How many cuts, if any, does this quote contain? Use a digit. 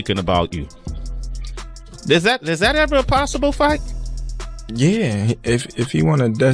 0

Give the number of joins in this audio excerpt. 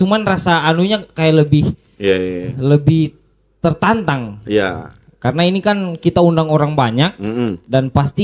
0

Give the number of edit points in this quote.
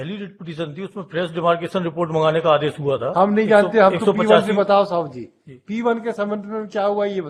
0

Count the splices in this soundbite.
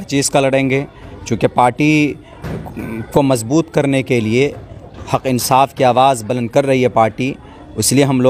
0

